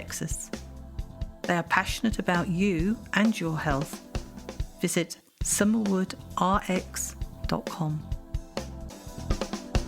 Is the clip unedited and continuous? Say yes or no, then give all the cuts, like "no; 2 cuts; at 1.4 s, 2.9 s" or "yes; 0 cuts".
no; 1 cut; at 8.9 s